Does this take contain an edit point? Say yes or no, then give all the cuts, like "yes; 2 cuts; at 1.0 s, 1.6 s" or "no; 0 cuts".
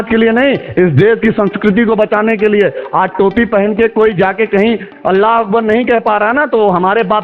no; 0 cuts